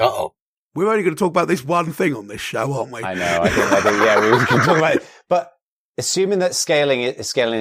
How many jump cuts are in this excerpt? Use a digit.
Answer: 0